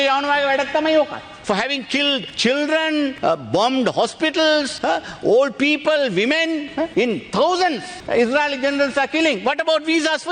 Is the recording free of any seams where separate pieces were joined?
no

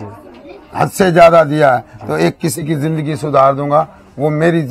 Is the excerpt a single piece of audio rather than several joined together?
yes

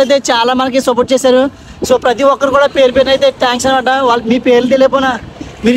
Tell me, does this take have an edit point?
no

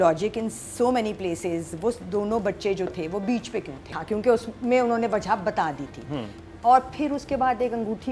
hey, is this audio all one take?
no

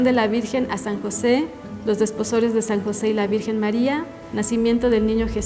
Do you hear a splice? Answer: yes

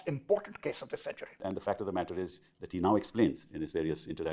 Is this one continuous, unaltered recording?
yes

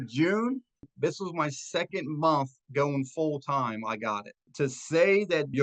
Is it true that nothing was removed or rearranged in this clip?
no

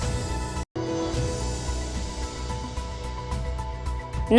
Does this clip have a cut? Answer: no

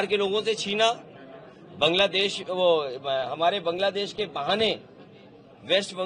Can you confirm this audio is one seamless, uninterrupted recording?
yes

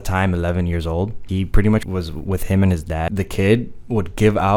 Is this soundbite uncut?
no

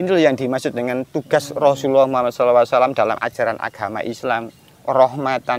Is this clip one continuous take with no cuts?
yes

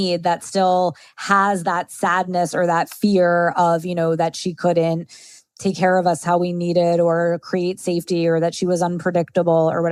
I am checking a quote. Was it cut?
no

